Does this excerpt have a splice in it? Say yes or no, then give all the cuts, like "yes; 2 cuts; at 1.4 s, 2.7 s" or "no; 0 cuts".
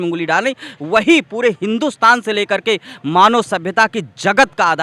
no; 0 cuts